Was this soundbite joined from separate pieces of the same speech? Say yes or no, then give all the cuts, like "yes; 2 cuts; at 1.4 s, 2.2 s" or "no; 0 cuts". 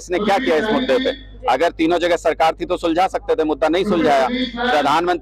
no; 0 cuts